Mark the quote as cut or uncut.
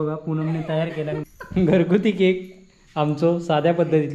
cut